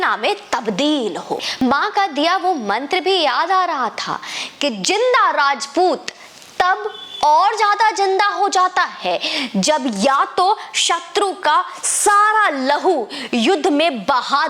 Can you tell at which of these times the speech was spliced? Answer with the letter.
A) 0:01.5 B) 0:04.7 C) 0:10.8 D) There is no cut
A